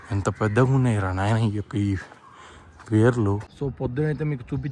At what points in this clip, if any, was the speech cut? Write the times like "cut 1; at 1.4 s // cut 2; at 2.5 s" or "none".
cut 1; at 3.5 s